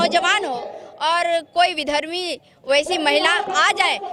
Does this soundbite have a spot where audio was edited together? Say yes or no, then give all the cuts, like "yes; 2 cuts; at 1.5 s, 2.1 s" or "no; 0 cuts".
no; 0 cuts